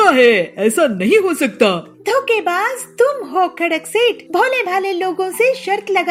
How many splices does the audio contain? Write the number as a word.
zero